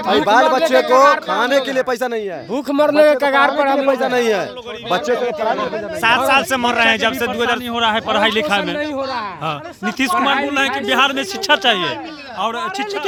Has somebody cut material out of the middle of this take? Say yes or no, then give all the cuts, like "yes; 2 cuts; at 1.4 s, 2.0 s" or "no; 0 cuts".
no; 0 cuts